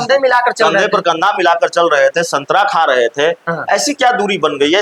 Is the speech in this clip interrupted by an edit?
no; 0 cuts

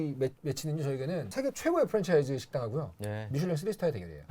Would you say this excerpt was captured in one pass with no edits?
no; 1 cut; at 1.3 s

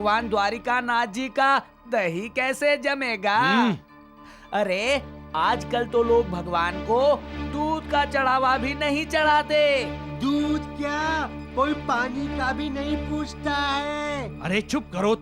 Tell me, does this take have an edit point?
no; 0 cuts

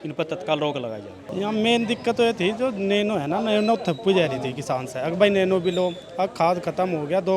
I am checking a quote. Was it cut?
yes; 1 cut; at 1.2 s

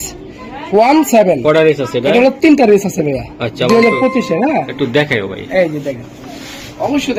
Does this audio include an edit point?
no; 0 cuts

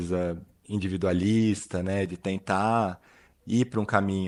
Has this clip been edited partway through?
no; 0 cuts

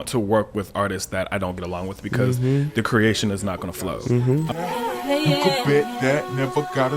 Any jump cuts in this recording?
yes; 1 cut; at 4.6 s

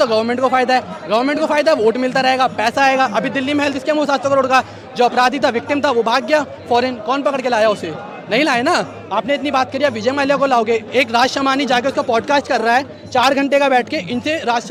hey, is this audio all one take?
yes; 0 cuts

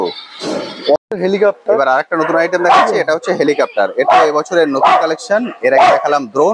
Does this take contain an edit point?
yes; 1 cut; at 1.0 s

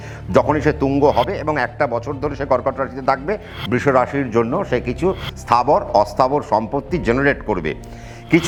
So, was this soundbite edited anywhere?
no; 0 cuts

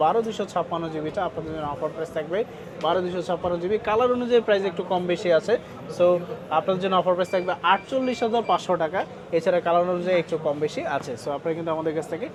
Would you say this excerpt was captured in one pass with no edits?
yes; 0 cuts

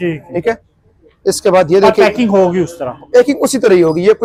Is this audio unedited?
yes; 0 cuts

